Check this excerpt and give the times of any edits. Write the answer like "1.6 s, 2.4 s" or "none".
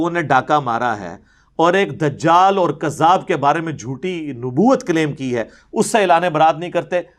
none